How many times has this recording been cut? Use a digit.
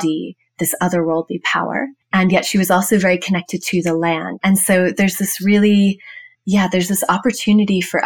1